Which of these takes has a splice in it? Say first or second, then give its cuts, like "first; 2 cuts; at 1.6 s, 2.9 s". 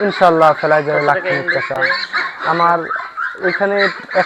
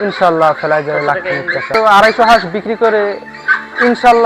second; 1 cut; at 1.7 s